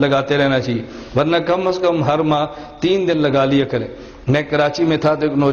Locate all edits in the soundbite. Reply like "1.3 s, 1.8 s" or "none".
none